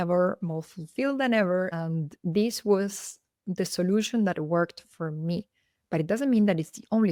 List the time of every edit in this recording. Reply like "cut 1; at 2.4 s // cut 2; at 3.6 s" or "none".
none